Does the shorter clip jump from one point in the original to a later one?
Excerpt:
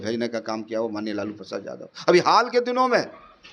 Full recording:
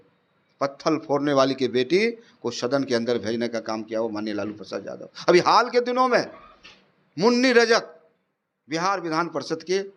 no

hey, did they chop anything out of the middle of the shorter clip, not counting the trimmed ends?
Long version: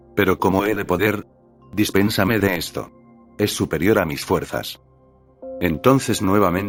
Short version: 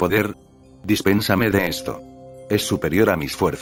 no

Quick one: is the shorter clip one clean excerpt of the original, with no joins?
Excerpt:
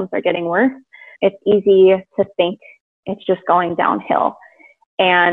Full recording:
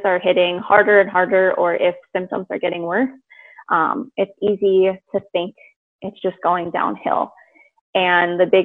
no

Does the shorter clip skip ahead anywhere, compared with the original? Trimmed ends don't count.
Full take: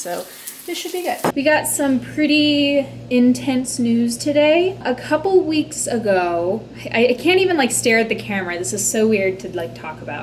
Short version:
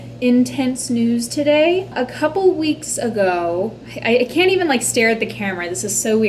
no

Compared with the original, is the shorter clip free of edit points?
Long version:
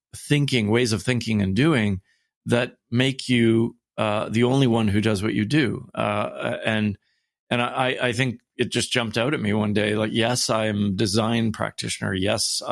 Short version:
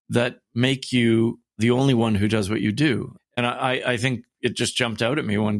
no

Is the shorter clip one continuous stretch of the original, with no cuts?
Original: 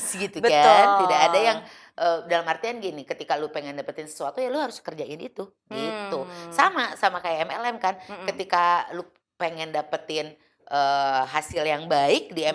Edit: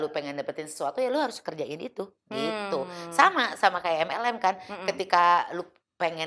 yes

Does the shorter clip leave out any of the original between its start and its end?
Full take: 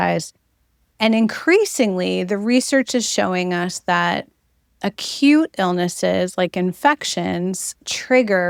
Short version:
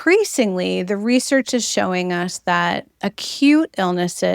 yes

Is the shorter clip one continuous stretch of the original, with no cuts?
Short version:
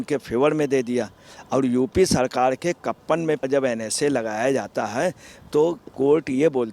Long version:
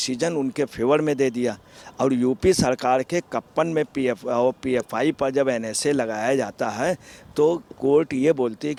no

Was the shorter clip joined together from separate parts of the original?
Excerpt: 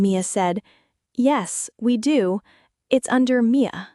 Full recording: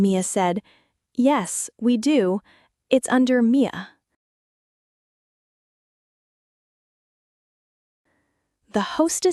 no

